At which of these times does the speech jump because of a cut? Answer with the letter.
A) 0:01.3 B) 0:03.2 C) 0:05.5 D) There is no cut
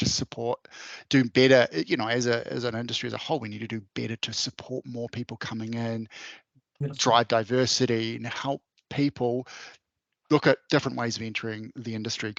D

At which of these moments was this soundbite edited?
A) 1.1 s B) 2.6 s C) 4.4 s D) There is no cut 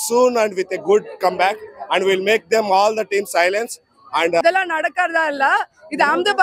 C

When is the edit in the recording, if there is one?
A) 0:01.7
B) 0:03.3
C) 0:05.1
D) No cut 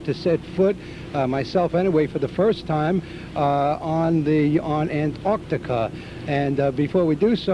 C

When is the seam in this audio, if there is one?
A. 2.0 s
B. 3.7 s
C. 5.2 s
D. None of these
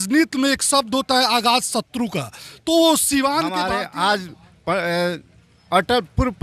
B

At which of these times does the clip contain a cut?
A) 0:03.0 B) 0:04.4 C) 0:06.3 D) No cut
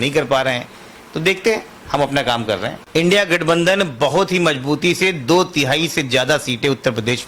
A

